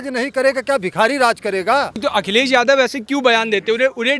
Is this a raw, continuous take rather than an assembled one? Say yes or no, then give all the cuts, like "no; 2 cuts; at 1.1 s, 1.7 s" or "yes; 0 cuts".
no; 1 cut; at 2.0 s